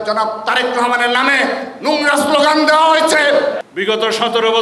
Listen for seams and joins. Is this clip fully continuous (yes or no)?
no